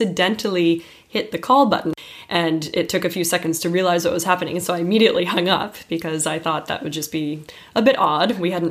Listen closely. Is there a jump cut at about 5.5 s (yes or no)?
no